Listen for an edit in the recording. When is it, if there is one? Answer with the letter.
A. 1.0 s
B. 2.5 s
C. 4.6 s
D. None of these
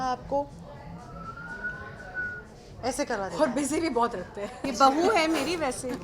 C